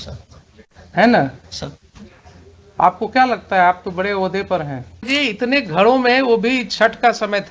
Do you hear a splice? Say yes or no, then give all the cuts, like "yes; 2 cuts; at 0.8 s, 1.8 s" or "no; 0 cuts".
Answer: yes; 1 cut; at 5.1 s